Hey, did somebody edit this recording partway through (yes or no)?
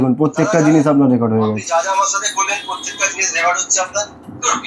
no